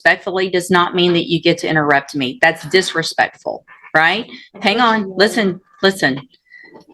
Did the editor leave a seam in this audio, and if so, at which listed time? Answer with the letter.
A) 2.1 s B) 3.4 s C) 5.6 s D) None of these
D